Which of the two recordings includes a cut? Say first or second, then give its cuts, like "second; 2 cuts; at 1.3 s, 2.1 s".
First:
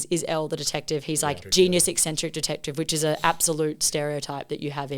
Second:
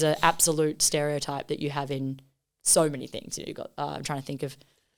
first; 1 cut; at 1.4 s